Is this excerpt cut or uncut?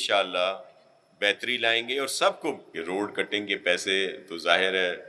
cut